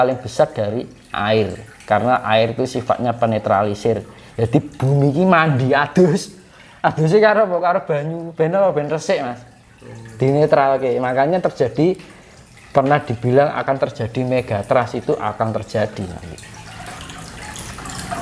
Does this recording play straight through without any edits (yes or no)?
yes